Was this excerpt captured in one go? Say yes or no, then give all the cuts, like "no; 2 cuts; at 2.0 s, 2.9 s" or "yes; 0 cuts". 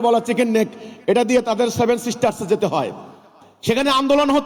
yes; 0 cuts